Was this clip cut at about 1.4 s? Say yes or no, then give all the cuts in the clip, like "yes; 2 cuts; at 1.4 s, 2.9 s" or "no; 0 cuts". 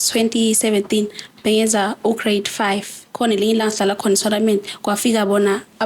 no; 1 cut; at 3.1 s